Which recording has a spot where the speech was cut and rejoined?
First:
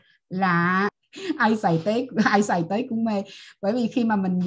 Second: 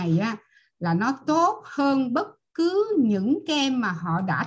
first; 1 cut; at 1.0 s

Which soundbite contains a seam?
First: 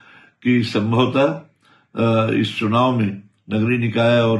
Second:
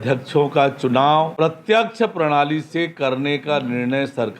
second; 1 cut; at 1.3 s

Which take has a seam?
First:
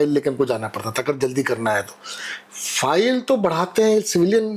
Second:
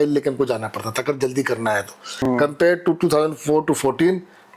second; 1 cut; at 2.1 s

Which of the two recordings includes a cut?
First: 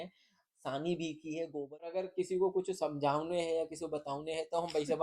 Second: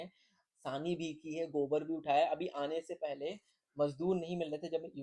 first; 1 cut; at 1.9 s

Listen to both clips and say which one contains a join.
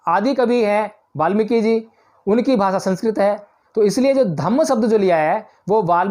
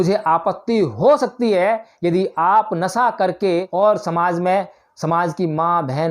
second; 1 cut; at 3.7 s

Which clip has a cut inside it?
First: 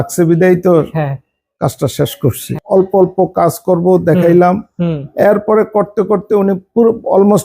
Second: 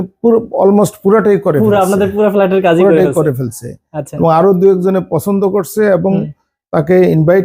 first; 1 cut; at 2.4 s

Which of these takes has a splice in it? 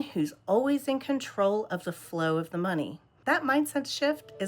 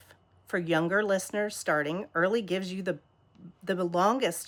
first; 1 cut; at 3.1 s

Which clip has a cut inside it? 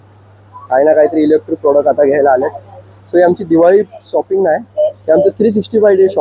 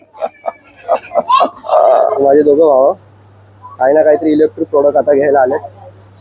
second; 1 cut; at 2.1 s

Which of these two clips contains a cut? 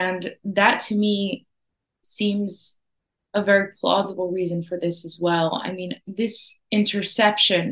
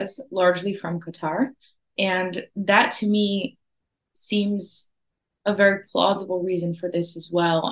first; 1 cut; at 6.5 s

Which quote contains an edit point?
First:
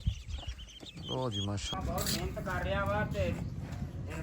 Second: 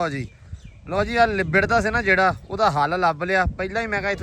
first; 1 cut; at 1.7 s

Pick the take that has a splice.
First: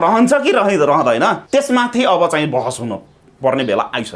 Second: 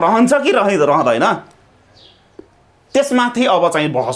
first; 1 cut; at 1.4 s

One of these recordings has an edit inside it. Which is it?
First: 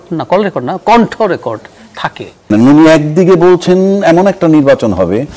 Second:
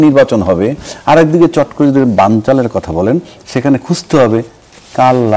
first; 1 cut; at 2.5 s

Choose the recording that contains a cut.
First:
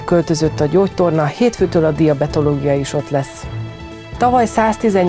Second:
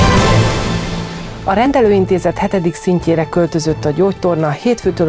second; 1 cut; at 1.6 s

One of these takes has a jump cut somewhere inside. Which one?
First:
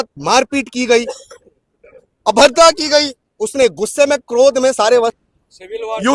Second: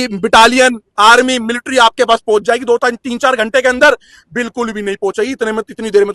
first; 1 cut; at 5.1 s

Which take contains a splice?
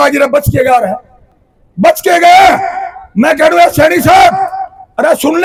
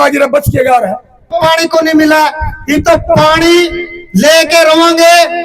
second; 1 cut; at 1.3 s

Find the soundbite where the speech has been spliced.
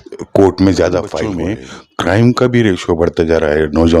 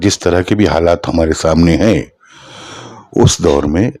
first; 1 cut; at 1.3 s

